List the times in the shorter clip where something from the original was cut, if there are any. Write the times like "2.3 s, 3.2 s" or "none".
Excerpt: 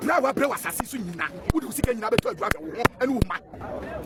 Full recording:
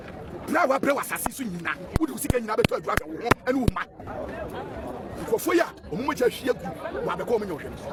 none

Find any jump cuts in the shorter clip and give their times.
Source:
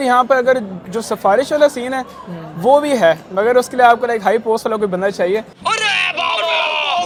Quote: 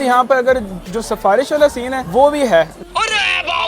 2.0 s, 2.8 s

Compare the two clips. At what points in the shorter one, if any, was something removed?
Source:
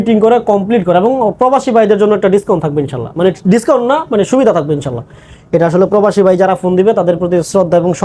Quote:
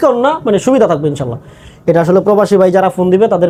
none

